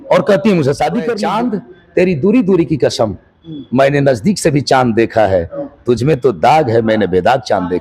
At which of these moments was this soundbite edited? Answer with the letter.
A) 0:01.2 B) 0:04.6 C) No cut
A